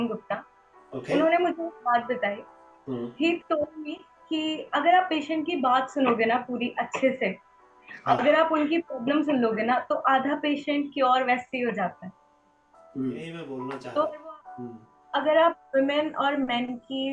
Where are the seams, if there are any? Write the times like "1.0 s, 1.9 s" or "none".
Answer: 13.5 s